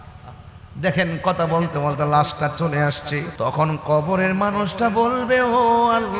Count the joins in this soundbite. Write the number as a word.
one